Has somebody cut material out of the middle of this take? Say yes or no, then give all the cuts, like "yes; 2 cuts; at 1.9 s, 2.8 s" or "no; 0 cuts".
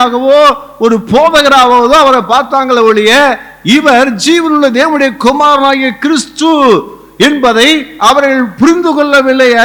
no; 0 cuts